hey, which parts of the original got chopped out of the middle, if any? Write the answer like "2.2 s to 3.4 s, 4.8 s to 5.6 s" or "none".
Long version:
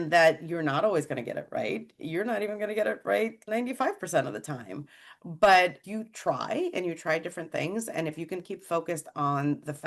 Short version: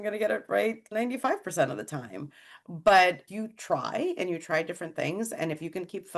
none